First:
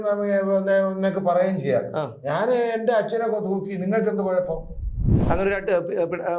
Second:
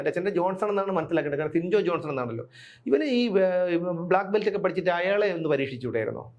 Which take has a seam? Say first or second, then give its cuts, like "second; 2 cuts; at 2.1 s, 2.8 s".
first; 1 cut; at 5.1 s